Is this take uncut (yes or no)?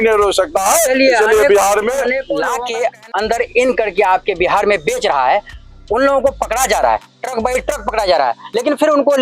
no